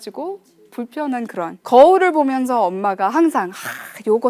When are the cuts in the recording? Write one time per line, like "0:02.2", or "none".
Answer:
0:01.6